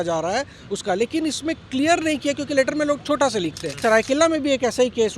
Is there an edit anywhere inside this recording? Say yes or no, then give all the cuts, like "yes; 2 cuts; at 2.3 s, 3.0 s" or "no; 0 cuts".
yes; 1 cut; at 3.7 s